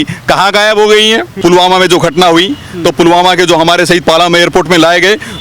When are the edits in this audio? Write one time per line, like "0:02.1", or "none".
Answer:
0:01.4